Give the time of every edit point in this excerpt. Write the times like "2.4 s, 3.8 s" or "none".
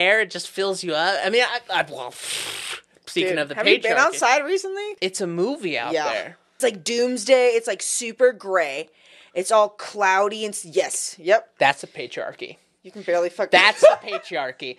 4.9 s, 6.6 s, 11.5 s